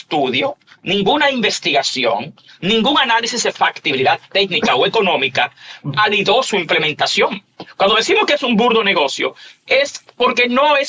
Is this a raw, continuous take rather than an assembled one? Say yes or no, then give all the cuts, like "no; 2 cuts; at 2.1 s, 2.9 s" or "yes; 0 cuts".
yes; 0 cuts